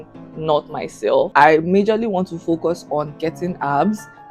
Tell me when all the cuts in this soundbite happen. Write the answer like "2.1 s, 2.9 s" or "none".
1.3 s